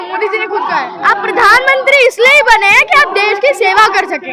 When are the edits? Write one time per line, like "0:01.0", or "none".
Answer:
0:00.9